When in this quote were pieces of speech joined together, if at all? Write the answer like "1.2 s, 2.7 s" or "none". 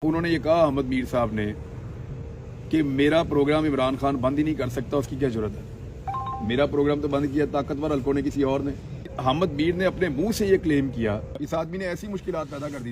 9.1 s, 11.3 s